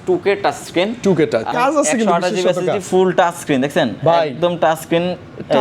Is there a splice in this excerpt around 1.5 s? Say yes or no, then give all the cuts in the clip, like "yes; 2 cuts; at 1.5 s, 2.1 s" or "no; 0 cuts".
yes; 1 cut; at 1.5 s